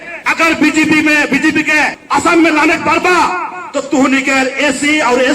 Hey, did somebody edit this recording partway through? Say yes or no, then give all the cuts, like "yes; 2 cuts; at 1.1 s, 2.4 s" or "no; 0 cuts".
yes; 1 cut; at 2.0 s